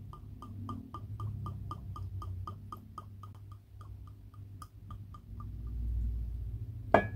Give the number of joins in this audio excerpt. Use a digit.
1